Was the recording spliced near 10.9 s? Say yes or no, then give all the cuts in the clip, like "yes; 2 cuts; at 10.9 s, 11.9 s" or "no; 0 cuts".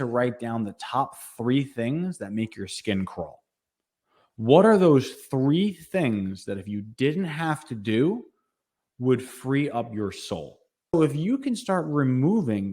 yes; 1 cut; at 10.9 s